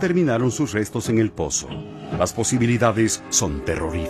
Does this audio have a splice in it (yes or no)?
no